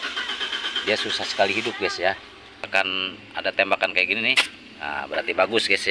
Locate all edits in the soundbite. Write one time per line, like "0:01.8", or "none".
0:02.7